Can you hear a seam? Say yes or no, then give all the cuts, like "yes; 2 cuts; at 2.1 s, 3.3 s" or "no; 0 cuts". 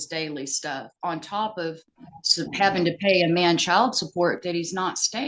no; 0 cuts